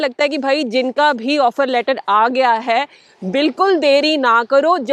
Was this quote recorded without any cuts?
yes; 0 cuts

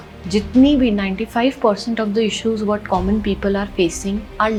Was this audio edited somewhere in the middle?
no; 0 cuts

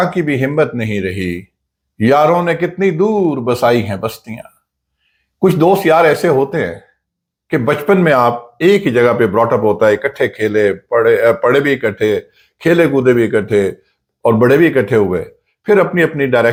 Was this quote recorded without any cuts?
yes; 0 cuts

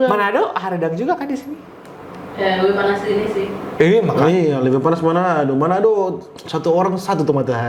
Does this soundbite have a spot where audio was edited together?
no; 0 cuts

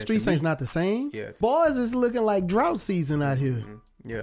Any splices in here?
yes; 1 cut; at 1.2 s

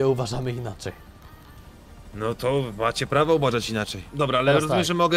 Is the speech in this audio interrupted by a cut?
yes; 2 cuts; at 2.0 s, 4.0 s

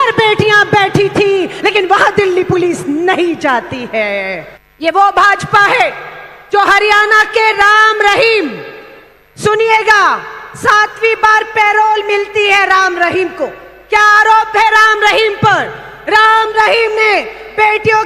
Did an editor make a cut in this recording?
yes; 1 cut; at 4.5 s

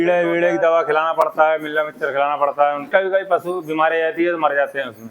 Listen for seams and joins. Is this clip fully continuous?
no; 1 cut; at 2.9 s

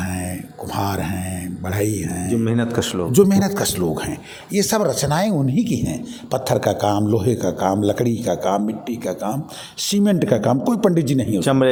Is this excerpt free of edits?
yes; 0 cuts

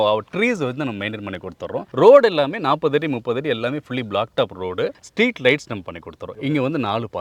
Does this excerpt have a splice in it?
no; 0 cuts

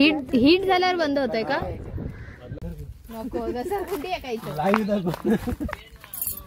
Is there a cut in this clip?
yes; 1 cut; at 2.6 s

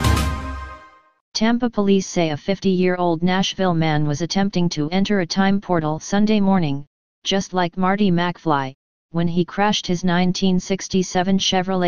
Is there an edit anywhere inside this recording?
no; 0 cuts

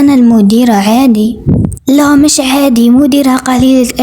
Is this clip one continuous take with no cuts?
no; 1 cut; at 1.7 s

